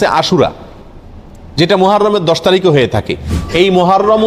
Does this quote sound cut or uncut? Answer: cut